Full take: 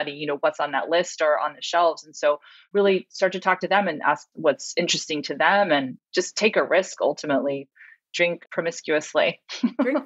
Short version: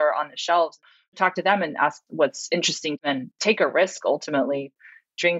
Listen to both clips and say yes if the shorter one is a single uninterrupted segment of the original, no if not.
no